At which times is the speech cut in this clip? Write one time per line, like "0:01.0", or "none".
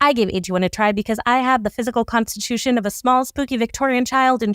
none